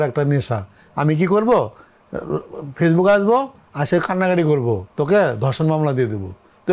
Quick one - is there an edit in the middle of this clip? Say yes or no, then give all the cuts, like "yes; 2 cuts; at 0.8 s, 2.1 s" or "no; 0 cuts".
yes; 1 cut; at 4.9 s